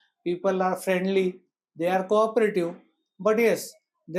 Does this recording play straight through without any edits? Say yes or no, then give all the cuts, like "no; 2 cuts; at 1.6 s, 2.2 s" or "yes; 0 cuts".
yes; 0 cuts